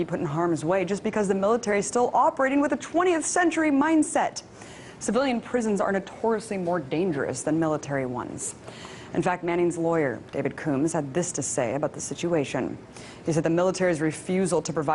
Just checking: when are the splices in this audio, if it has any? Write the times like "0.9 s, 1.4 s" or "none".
3.1 s